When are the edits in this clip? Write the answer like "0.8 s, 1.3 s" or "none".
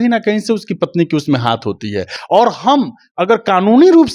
2.1 s